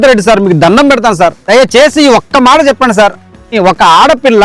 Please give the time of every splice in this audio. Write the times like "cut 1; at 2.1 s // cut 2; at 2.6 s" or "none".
cut 1; at 1.4 s // cut 2; at 3.4 s